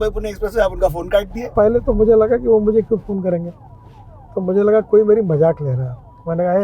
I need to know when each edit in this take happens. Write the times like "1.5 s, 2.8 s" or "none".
1.5 s